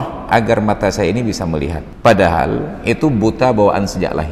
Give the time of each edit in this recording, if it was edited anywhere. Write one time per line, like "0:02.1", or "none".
0:01.8

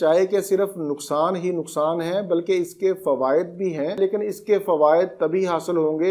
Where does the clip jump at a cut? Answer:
0:04.0

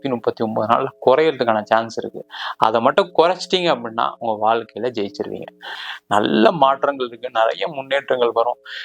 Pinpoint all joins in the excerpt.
0:05.7

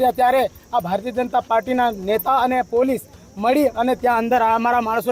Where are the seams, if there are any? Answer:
none

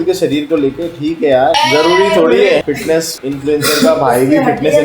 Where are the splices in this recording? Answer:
0:01.6
0:02.8

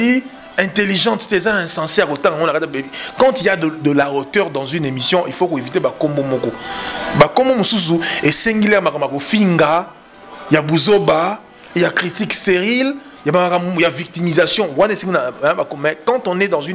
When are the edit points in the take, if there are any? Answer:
none

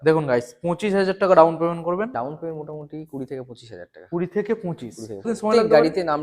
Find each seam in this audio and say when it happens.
0:02.1
0:05.3

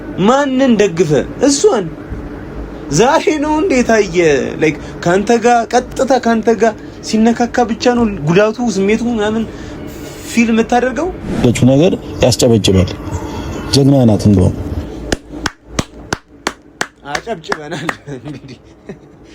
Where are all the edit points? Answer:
0:11.4

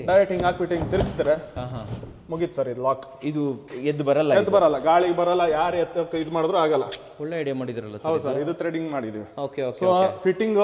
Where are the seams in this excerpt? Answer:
none

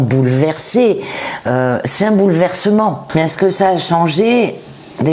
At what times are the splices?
0:03.0

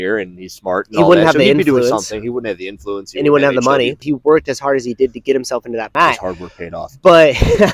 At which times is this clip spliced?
0:04.0
0:05.9

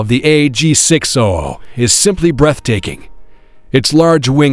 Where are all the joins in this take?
none

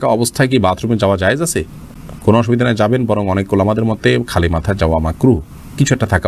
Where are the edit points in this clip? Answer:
none

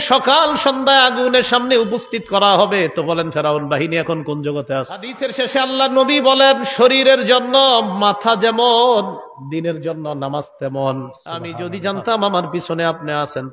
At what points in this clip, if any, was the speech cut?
0:05.2
0:11.5

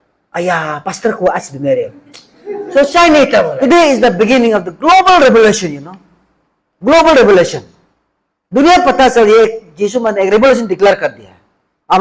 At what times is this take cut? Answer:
0:03.5

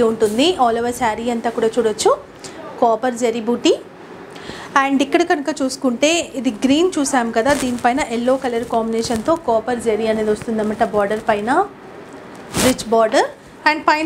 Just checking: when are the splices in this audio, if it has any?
none

